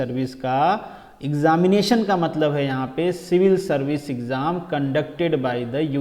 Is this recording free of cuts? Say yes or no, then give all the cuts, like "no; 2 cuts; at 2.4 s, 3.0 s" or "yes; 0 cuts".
yes; 0 cuts